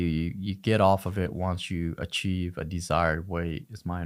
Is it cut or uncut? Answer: uncut